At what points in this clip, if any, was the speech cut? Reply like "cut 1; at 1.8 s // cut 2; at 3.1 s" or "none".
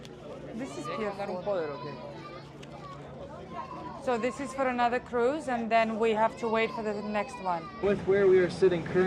cut 1; at 7.7 s